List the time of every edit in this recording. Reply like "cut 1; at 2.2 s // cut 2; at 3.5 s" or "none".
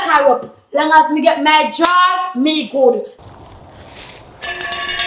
cut 1; at 3.2 s